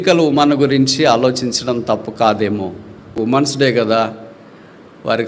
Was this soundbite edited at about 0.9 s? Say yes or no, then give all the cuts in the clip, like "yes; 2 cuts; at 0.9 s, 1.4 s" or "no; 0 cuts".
no; 1 cut; at 3.1 s